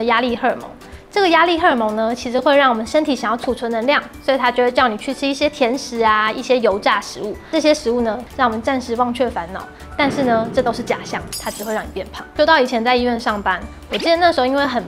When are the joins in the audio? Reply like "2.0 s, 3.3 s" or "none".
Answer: 12.2 s